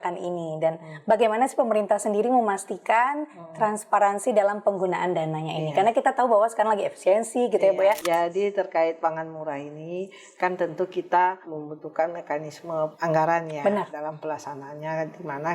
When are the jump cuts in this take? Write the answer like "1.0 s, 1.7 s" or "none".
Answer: 8.0 s, 11.5 s, 12.9 s, 13.9 s